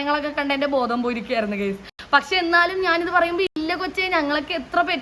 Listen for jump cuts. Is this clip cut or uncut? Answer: uncut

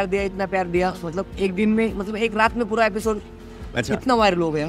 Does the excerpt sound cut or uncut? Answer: uncut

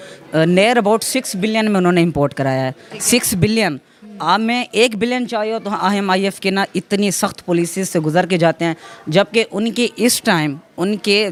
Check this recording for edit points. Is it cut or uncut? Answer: uncut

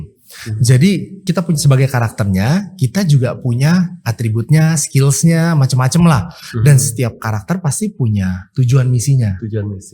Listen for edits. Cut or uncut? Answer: cut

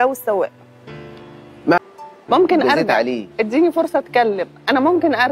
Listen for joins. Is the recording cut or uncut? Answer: cut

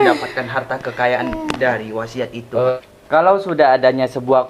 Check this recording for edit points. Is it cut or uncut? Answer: cut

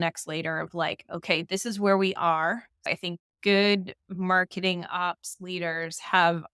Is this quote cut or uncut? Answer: cut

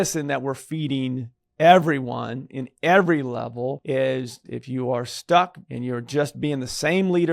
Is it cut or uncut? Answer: cut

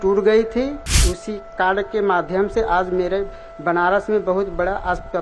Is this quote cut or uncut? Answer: cut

